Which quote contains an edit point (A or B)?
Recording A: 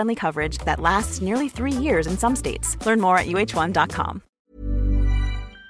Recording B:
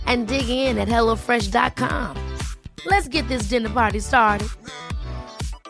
A